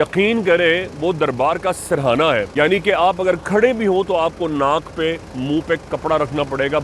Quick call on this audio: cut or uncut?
cut